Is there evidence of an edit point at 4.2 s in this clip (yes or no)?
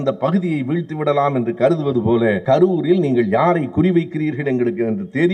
no